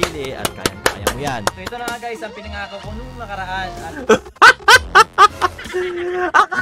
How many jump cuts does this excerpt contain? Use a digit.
1